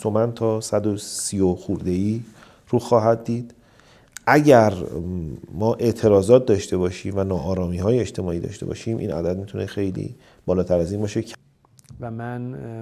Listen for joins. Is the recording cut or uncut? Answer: cut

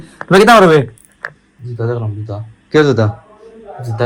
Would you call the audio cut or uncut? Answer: uncut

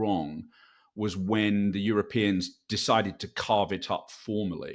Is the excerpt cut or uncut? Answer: uncut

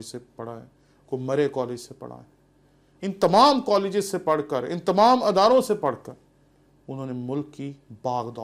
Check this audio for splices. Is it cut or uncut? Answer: uncut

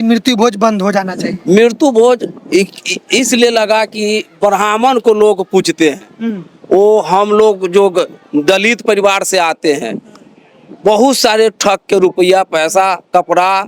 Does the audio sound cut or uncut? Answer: uncut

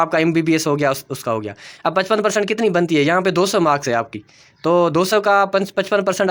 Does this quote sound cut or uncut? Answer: uncut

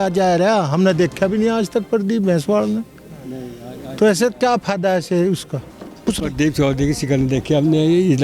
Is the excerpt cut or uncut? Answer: cut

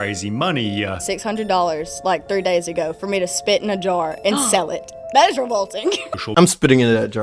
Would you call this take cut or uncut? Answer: cut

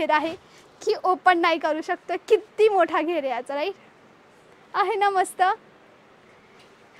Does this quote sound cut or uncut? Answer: uncut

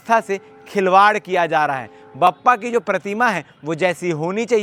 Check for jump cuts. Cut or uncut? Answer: uncut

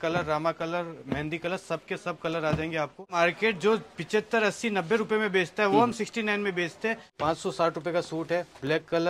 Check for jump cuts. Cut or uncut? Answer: cut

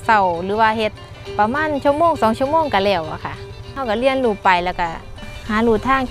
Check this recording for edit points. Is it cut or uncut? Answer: uncut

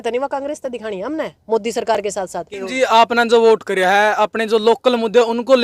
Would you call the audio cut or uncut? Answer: cut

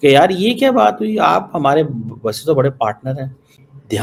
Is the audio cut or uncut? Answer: uncut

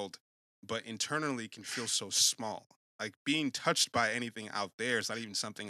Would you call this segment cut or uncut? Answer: cut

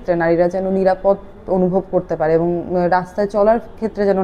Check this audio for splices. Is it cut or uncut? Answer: uncut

